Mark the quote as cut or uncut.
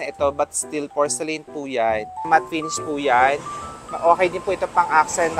cut